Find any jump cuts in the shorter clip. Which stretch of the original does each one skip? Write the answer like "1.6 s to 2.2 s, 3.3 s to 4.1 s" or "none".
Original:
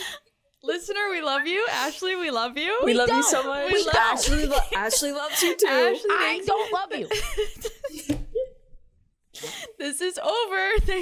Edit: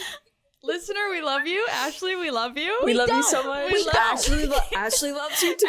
none